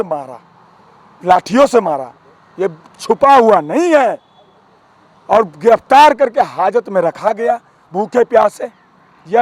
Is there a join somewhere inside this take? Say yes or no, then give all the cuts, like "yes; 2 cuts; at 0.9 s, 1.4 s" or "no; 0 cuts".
no; 0 cuts